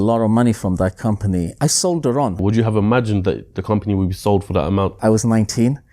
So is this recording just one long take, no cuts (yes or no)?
no